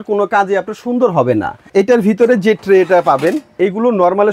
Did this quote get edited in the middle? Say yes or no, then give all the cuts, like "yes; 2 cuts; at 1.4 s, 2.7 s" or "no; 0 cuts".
yes; 1 cut; at 1.6 s